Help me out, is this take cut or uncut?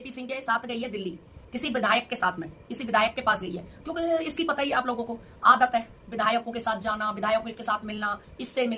uncut